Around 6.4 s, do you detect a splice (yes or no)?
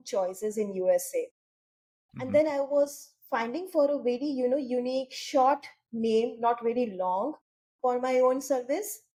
no